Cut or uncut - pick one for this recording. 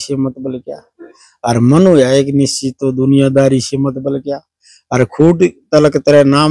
uncut